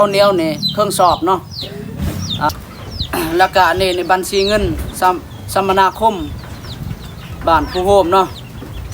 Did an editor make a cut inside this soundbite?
yes; 1 cut; at 2.5 s

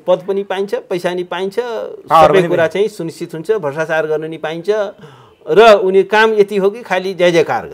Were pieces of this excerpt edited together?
no; 0 cuts

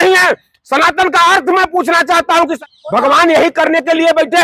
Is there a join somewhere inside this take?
yes; 1 cut; at 2.6 s

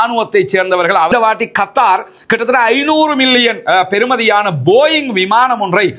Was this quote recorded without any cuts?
no; 1 cut; at 1.1 s

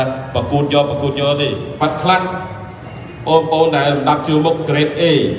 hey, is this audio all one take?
no; 1 cut; at 1.8 s

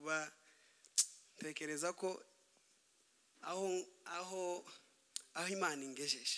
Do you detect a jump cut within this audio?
no; 0 cuts

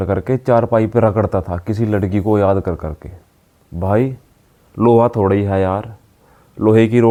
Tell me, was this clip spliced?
no; 0 cuts

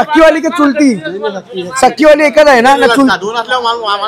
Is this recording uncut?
no; 1 cut; at 3.1 s

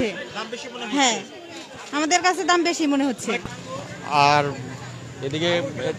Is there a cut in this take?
no; 0 cuts

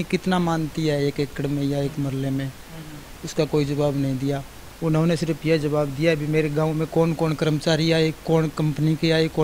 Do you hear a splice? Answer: no; 0 cuts

